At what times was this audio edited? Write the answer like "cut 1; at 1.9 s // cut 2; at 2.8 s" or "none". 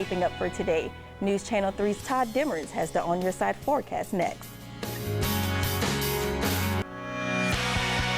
cut 1; at 6.9 s